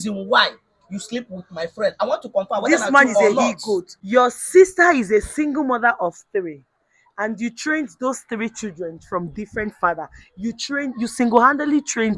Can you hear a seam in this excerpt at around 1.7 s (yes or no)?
no